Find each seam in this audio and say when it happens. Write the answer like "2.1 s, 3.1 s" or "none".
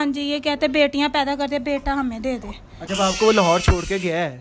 2.8 s